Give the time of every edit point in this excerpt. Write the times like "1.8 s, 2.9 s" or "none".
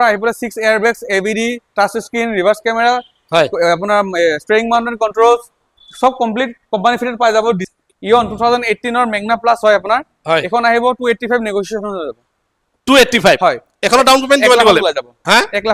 7.6 s